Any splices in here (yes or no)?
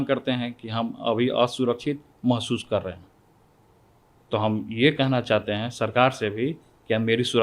no